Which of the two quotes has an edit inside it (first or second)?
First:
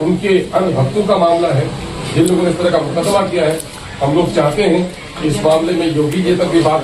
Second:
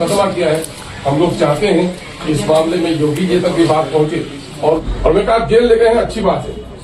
second